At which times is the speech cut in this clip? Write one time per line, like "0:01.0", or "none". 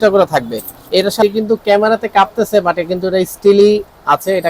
0:01.2